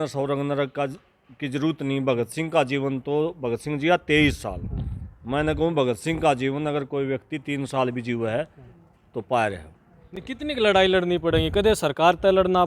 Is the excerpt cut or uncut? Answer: uncut